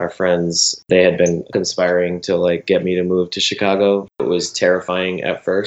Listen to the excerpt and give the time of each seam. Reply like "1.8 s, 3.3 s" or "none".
0.8 s, 1.5 s, 4.2 s